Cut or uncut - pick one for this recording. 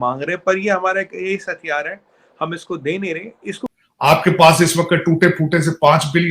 cut